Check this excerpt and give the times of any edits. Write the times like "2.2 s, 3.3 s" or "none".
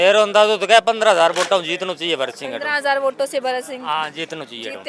none